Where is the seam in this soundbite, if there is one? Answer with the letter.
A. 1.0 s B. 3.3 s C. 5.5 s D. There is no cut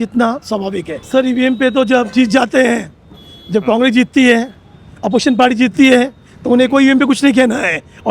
A